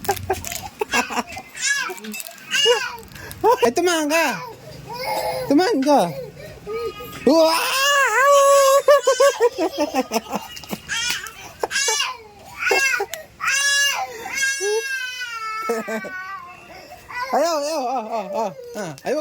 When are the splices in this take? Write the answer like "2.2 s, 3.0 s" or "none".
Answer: 3.6 s